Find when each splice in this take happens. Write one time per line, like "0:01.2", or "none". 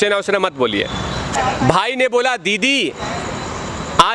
0:01.3